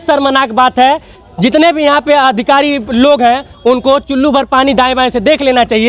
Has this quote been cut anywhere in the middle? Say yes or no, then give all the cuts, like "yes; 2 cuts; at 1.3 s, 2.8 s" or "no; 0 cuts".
no; 0 cuts